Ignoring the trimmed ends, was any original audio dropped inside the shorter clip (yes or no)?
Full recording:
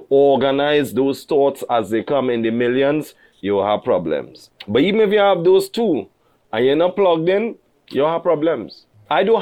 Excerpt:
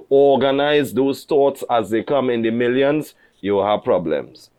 no